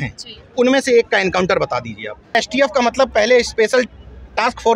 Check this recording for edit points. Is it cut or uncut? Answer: cut